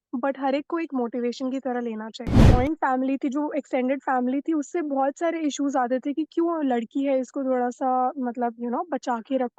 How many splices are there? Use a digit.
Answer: 1